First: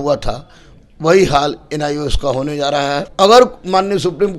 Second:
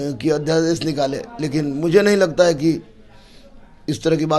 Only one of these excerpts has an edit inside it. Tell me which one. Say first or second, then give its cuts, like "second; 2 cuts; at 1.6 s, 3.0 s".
first; 1 cut; at 3.1 s